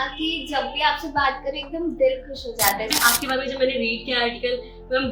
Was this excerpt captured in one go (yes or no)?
no